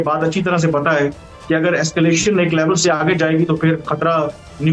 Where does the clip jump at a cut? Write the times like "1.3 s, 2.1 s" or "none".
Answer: none

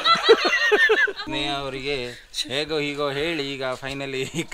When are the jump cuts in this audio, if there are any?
1.1 s

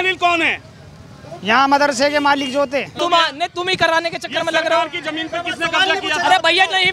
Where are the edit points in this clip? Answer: 2.9 s

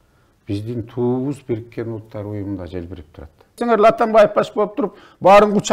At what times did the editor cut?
3.6 s

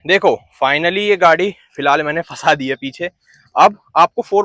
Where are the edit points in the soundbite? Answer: none

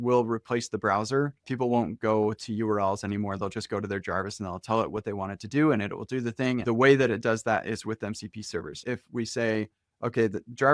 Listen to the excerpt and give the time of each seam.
1.5 s, 6.6 s, 8.8 s

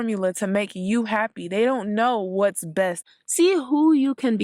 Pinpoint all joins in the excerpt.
3.1 s

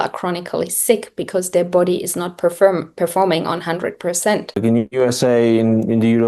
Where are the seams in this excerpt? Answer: 4.6 s

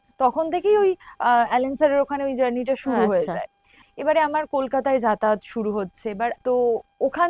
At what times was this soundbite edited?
3.8 s, 6.4 s

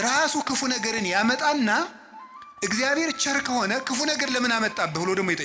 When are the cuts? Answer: none

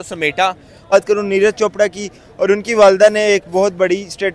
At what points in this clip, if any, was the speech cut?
0.9 s

